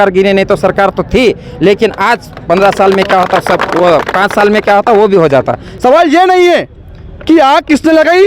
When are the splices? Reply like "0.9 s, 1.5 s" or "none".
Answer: 5.6 s